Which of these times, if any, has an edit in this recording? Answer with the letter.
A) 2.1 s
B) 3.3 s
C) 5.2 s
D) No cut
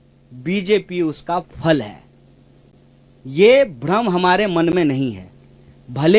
D